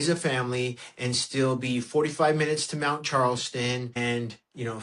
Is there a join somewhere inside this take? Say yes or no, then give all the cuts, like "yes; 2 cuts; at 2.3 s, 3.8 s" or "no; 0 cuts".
no; 0 cuts